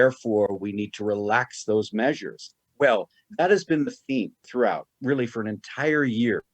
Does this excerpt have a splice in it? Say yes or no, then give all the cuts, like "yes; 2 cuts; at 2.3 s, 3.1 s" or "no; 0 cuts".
yes; 1 cut; at 2.5 s